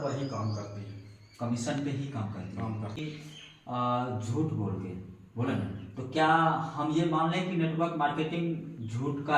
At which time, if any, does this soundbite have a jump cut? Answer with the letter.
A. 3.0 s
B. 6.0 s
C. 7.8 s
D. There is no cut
A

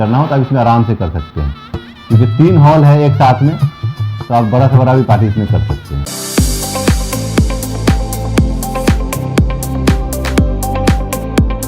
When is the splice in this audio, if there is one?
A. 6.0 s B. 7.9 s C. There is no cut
A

